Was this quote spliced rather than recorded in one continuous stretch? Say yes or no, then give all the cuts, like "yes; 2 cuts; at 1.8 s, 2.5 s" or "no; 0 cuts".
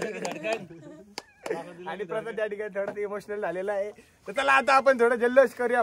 no; 0 cuts